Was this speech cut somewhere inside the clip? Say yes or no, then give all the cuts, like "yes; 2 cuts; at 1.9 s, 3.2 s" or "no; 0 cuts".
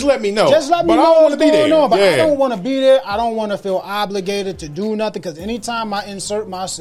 no; 0 cuts